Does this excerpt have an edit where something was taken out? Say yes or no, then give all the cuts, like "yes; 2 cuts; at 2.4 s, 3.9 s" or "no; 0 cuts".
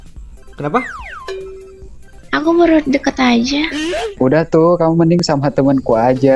yes; 1 cut; at 4.1 s